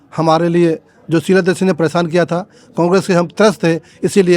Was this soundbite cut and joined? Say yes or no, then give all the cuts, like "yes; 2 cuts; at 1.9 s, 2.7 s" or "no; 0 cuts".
no; 0 cuts